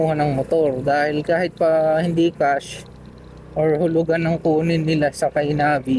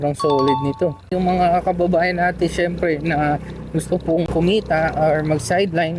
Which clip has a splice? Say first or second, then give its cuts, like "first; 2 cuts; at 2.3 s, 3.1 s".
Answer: second; 2 cuts; at 1.1 s, 4.2 s